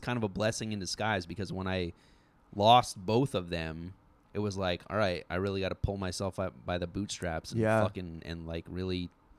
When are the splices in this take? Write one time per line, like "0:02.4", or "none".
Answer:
0:08.3